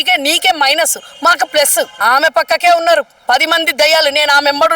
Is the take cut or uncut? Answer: cut